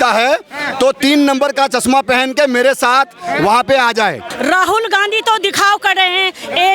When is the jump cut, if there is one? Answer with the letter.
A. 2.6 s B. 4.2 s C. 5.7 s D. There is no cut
B